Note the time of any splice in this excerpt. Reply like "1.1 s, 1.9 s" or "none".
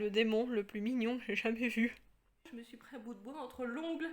2.5 s